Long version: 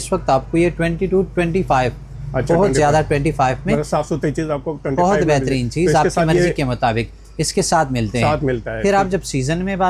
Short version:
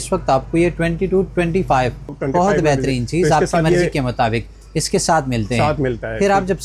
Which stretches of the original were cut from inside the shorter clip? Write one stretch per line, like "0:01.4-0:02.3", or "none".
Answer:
0:02.1-0:04.7